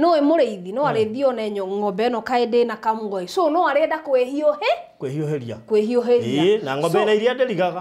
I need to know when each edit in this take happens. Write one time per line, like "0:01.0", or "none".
none